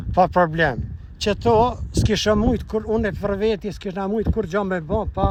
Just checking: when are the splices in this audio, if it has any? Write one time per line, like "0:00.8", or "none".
none

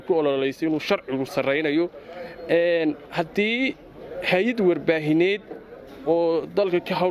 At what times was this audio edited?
none

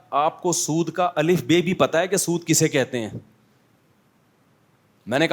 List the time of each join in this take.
none

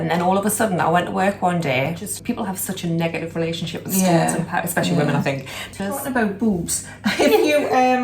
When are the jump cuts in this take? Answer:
0:02.1
0:06.0

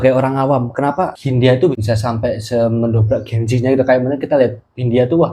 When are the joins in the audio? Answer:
0:01.2
0:01.7

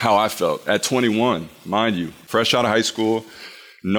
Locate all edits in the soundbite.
0:02.2

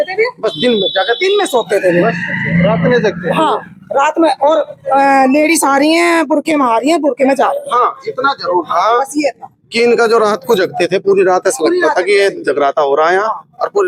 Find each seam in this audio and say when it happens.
none

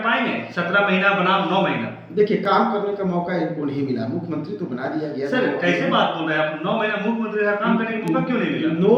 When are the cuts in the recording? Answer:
none

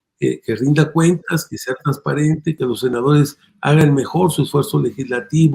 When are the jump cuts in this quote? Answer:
0:02.6

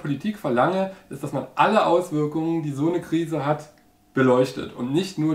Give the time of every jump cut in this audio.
none

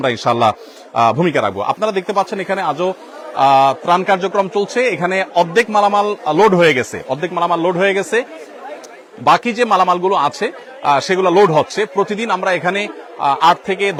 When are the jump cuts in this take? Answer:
none

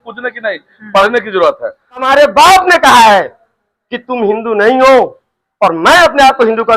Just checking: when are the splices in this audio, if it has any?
0:02.0

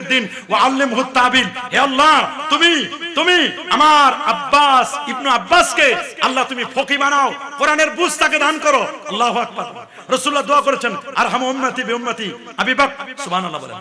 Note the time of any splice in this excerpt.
none

